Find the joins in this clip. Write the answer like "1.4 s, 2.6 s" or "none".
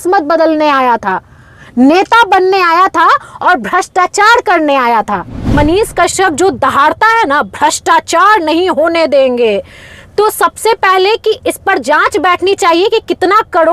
5.5 s